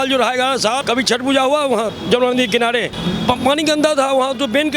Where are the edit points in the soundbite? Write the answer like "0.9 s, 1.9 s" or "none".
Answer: 0.8 s, 2.0 s, 2.9 s